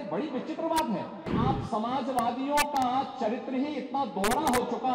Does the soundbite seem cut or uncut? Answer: cut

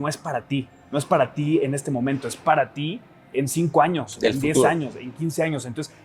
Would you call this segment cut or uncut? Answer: uncut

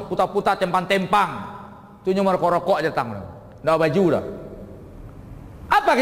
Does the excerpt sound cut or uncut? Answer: uncut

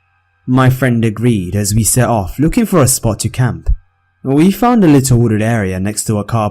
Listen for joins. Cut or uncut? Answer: cut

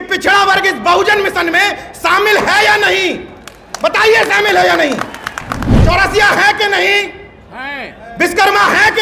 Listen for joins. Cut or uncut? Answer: cut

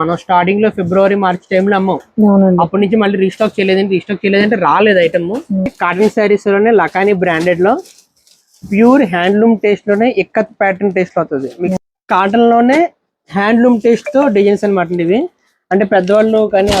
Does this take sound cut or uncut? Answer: cut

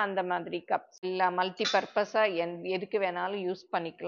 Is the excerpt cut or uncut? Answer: cut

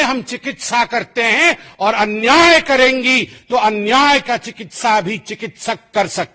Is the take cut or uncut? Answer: uncut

